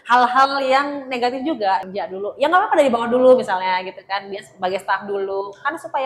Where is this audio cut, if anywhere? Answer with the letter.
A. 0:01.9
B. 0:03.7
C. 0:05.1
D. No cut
A